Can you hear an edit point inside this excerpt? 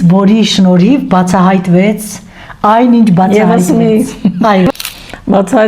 yes; 1 cut; at 4.7 s

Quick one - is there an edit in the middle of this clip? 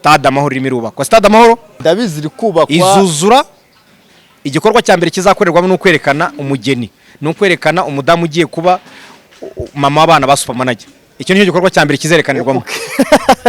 yes; 1 cut; at 1.7 s

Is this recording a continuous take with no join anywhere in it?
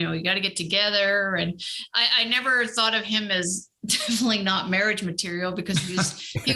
yes; 0 cuts

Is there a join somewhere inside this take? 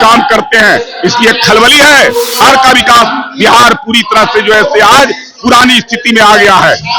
yes; 1 cut; at 2.4 s

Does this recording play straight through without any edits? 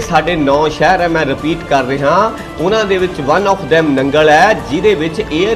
yes; 0 cuts

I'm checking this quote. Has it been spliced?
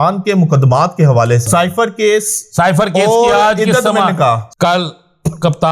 yes; 2 cuts; at 1.5 s, 4.5 s

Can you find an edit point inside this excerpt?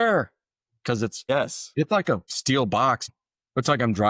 yes; 3 cuts; at 1.3 s, 2.3 s, 3.0 s

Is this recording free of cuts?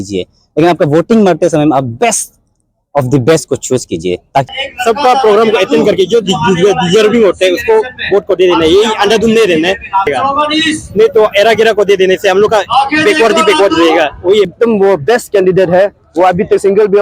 no; 3 cuts; at 4.5 s, 10.1 s, 14.5 s

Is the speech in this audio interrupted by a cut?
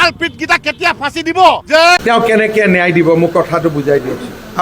yes; 1 cut; at 2.0 s

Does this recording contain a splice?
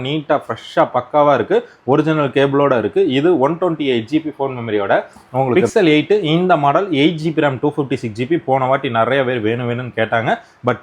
yes; 1 cut; at 5.5 s

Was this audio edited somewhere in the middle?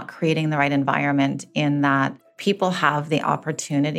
yes; 1 cut; at 2.3 s

